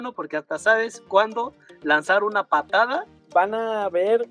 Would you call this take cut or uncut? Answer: cut